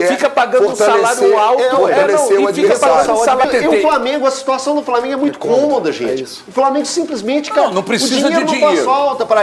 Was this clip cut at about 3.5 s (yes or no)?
yes